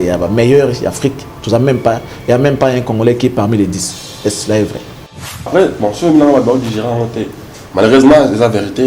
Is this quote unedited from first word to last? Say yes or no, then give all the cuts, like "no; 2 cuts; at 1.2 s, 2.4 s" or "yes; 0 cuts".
no; 1 cut; at 5.5 s